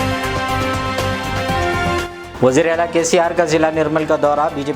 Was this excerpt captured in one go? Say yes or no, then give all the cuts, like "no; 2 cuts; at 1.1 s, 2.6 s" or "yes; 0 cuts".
no; 1 cut; at 2.0 s